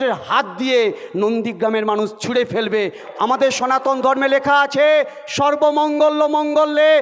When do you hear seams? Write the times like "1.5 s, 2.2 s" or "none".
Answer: 3.0 s